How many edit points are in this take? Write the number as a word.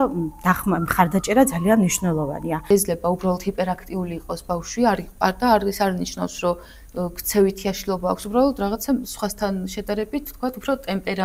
one